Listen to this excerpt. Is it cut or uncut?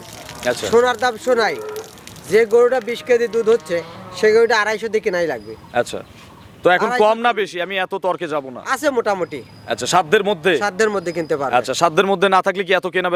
uncut